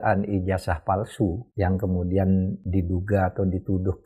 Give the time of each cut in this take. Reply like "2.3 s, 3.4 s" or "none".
1.4 s, 2.6 s